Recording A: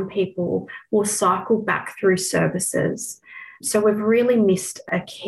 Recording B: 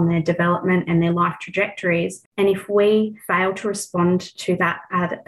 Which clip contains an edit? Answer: B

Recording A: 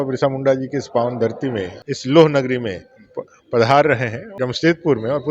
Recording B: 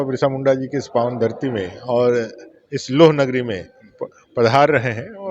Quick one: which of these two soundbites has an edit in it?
A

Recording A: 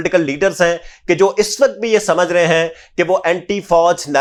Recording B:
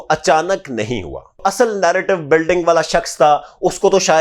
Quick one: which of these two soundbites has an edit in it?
B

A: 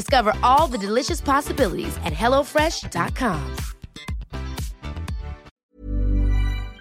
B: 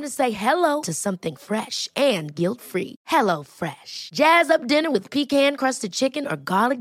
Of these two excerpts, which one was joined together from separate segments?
A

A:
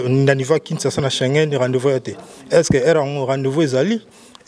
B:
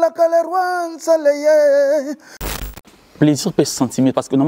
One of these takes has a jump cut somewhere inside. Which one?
B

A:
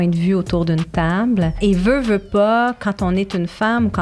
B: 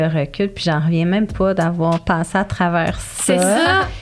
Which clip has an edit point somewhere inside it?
A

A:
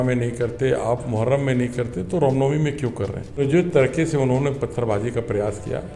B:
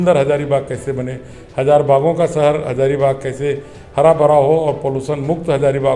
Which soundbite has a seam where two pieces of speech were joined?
A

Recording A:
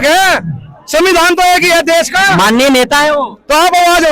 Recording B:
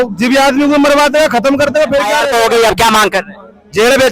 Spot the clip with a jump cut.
B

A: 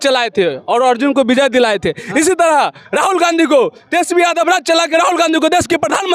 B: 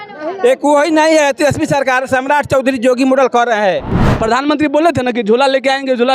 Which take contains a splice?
B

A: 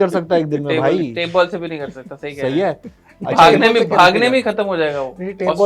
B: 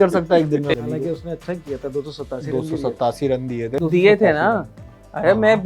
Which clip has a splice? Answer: B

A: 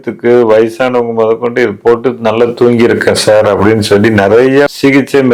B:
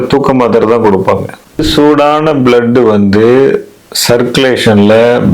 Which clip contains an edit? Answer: B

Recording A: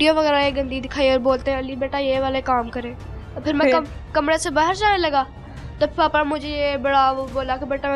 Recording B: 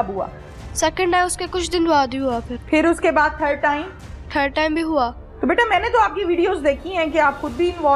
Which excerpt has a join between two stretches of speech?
B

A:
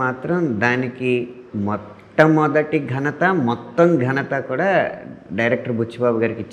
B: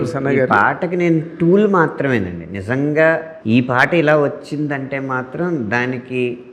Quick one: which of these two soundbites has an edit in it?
B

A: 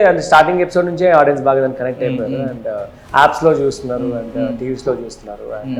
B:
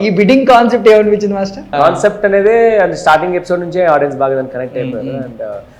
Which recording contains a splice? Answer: B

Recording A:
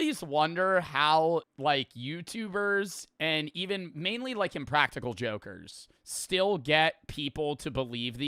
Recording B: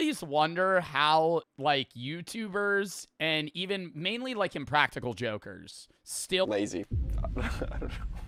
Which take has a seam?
A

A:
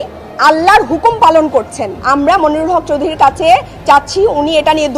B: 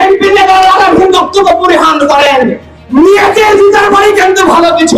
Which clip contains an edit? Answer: A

